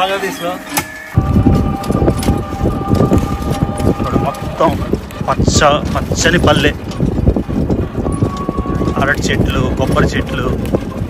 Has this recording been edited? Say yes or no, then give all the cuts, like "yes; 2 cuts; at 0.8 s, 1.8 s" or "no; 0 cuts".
yes; 1 cut; at 1.0 s